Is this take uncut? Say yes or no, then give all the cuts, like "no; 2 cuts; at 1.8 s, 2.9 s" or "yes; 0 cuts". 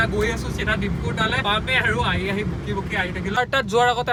yes; 0 cuts